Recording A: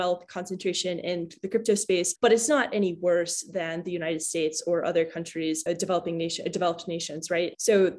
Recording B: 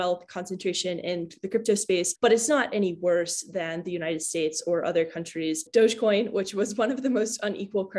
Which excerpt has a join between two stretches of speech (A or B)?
B